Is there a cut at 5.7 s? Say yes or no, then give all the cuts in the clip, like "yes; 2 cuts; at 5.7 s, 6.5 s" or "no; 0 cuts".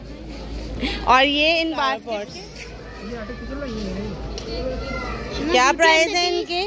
no; 1 cut; at 2.2 s